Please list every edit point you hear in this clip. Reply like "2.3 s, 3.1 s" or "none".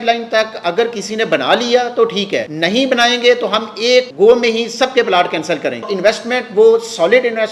2.5 s, 4.1 s, 5.9 s